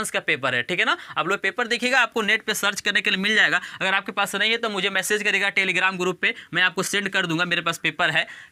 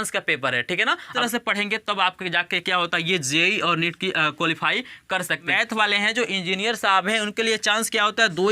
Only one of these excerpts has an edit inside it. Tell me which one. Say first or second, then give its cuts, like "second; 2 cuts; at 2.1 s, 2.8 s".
second; 2 cuts; at 1.1 s, 5.5 s